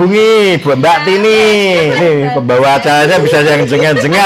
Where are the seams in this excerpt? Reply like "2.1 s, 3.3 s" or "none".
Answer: 2.0 s

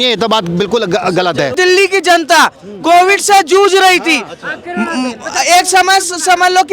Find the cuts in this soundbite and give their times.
1.5 s

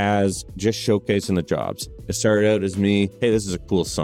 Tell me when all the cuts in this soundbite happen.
3.1 s

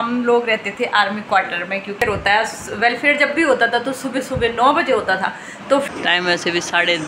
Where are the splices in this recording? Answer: 2.0 s, 5.9 s

